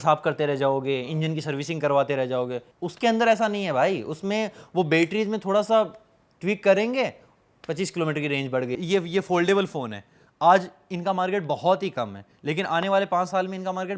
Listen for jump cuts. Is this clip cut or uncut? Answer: cut